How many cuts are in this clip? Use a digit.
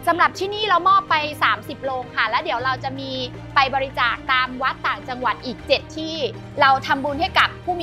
1